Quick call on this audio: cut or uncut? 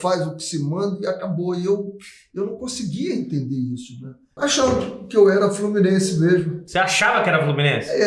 cut